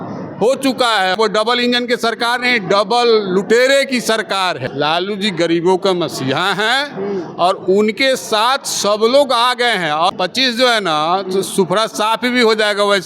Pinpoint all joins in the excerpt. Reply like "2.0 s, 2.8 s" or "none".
1.2 s, 4.7 s, 10.1 s